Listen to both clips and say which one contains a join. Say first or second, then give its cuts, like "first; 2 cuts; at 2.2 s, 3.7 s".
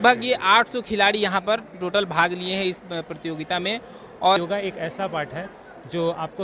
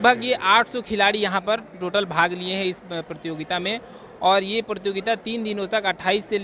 first; 1 cut; at 4.4 s